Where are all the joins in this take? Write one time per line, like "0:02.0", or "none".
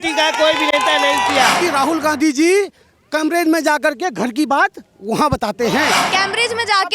0:01.6
0:06.0